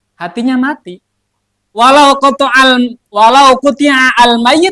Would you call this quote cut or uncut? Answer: uncut